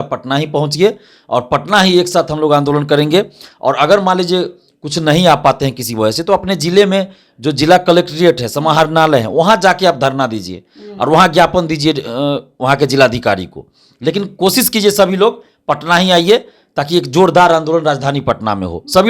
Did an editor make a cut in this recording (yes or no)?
no